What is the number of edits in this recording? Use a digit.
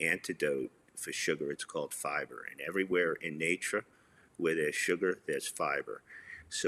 0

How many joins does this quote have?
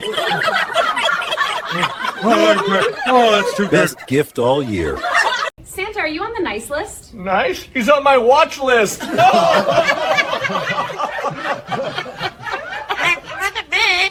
0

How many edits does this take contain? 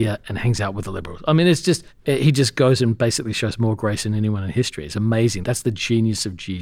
2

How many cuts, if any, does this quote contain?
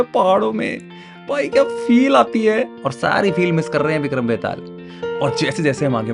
0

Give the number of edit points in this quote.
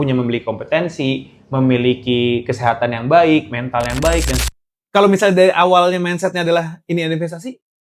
1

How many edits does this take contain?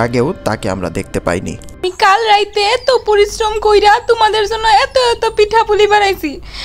1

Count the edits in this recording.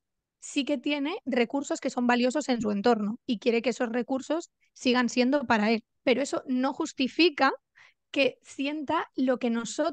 2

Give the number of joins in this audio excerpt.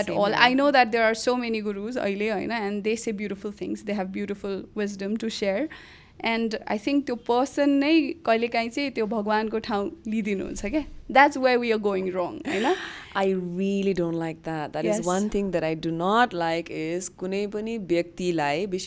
0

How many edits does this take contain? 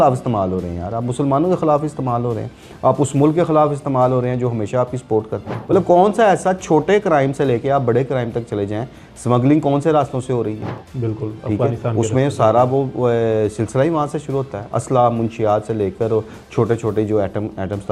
1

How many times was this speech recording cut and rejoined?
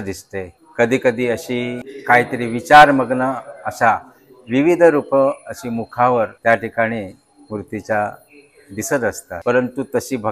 0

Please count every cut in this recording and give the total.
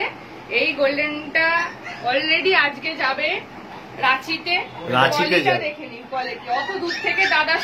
0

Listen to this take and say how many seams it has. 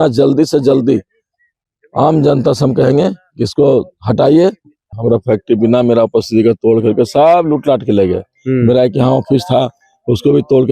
1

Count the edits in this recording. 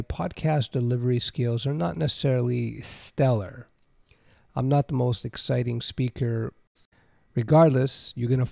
1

